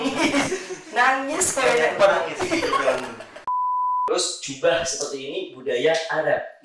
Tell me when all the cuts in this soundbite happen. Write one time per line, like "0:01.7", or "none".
0:03.6